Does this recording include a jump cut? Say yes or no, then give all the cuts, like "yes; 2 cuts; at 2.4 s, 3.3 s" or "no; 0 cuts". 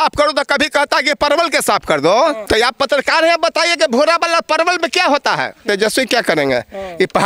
yes; 2 cuts; at 2.4 s, 5.6 s